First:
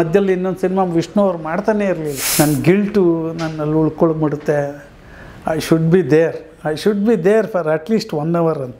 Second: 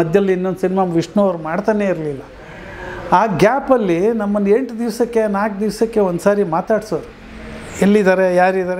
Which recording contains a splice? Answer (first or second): first